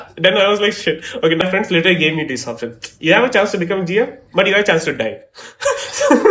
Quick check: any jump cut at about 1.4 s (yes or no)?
yes